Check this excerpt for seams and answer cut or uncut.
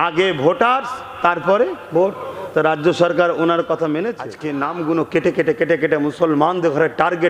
cut